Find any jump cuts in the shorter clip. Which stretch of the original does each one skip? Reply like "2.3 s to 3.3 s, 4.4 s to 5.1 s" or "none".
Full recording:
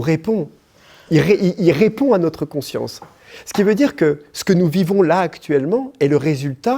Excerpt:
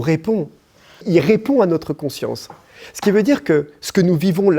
1.0 s to 1.6 s